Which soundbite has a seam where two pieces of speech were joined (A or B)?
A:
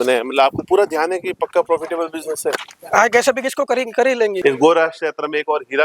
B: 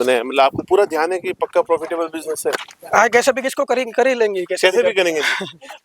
A